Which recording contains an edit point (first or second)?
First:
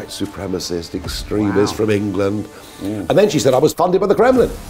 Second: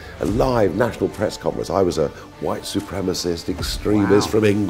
first